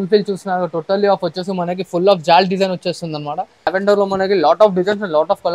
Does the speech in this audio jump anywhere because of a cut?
yes; 1 cut; at 3.8 s

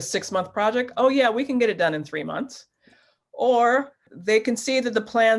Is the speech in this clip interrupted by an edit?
yes; 1 cut; at 4.0 s

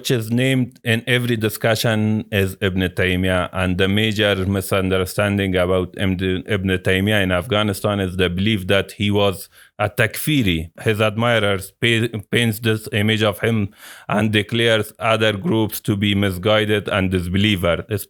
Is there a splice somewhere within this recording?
no; 0 cuts

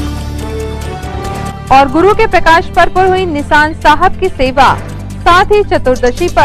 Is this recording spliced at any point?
yes; 1 cut; at 1.6 s

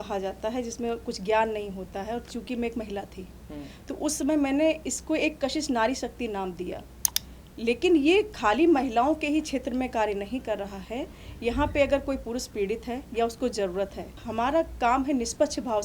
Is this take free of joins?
no; 1 cut; at 14.2 s

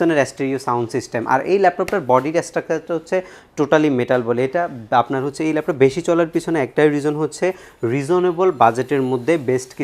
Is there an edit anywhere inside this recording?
no; 0 cuts

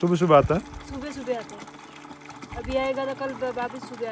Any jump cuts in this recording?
no; 0 cuts

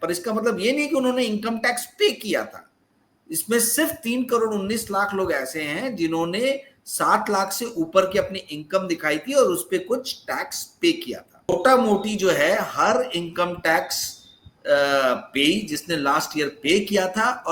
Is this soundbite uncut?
no; 1 cut; at 11.5 s

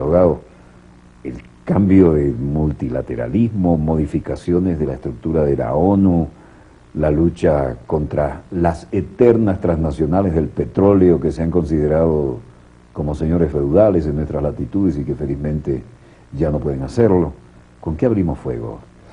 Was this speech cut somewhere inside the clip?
yes; 1 cut; at 16.2 s

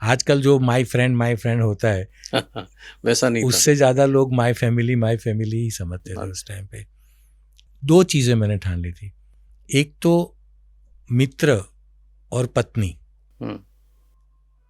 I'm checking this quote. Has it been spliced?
yes; 1 cut; at 7.5 s

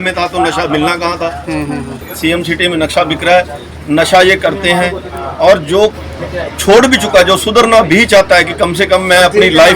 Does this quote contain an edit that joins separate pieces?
yes; 1 cut; at 2.0 s

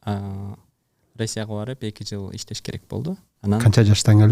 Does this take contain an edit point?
yes; 1 cut; at 3.3 s

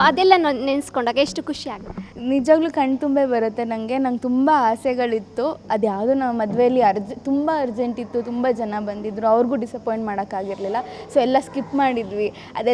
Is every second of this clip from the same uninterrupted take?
yes; 0 cuts

